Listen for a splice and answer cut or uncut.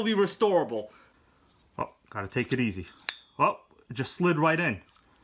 cut